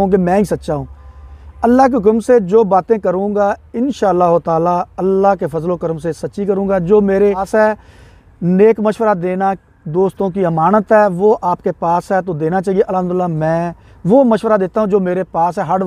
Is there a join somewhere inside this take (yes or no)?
yes